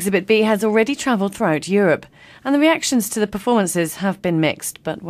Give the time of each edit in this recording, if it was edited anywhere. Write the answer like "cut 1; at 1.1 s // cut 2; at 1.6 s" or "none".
cut 1; at 3.1 s

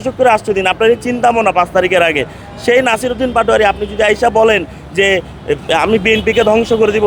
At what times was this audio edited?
none

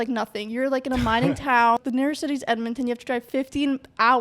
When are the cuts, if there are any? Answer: cut 1; at 1.8 s

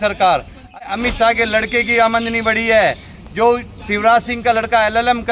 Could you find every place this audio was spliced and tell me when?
cut 1; at 0.9 s

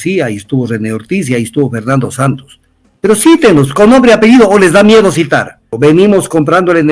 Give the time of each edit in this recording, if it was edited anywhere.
cut 1; at 5.7 s

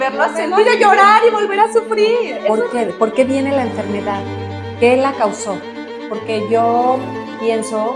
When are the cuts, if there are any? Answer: cut 1; at 2.4 s

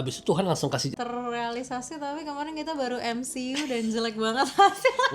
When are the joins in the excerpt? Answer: cut 1; at 0.9 s

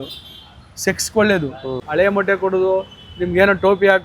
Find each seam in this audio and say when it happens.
cut 1; at 1.8 s

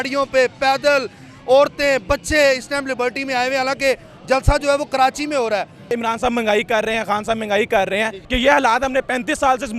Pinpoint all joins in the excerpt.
cut 1; at 6.0 s // cut 2; at 8.2 s

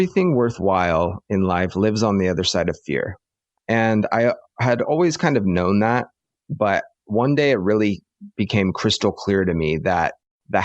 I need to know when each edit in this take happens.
cut 1; at 4.8 s

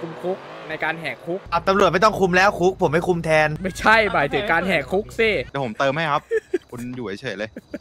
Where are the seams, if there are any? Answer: cut 1; at 1.4 s // cut 2; at 3.6 s // cut 3; at 5.5 s

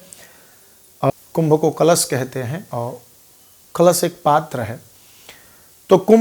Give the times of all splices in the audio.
cut 1; at 1.1 s

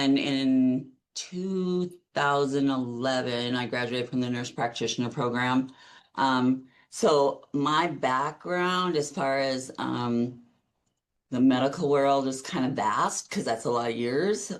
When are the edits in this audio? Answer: none

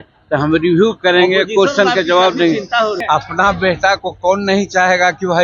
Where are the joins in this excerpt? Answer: cut 1; at 3.0 s

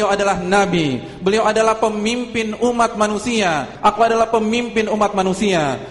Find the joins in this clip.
cut 1; at 3.7 s

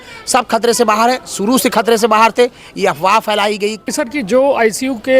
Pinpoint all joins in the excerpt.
cut 1; at 4.0 s

